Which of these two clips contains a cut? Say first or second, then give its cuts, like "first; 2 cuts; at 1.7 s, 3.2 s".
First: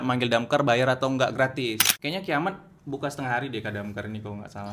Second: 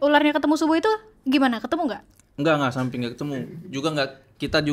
first; 1 cut; at 1.8 s